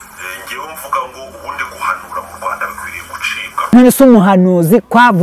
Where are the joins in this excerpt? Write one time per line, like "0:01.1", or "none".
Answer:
0:03.7